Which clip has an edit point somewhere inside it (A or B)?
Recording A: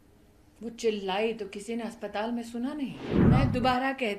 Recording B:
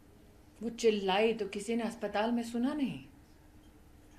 A